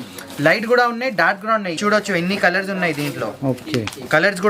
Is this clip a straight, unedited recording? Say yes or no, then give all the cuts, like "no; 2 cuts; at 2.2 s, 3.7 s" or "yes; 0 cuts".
no; 1 cut; at 1.8 s